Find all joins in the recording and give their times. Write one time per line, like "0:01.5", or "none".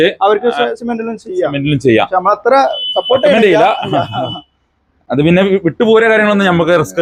none